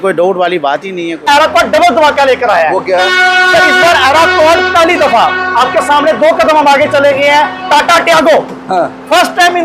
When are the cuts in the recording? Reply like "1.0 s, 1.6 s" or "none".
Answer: 1.3 s